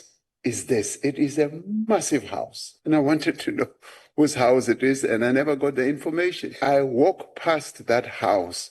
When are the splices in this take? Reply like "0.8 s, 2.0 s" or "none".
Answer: 6.6 s